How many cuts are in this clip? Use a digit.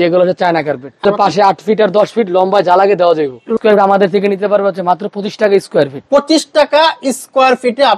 2